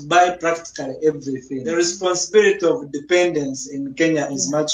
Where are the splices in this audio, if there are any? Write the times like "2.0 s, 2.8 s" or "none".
1.7 s